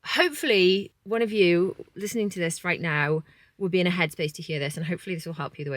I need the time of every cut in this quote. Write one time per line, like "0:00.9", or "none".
0:00.9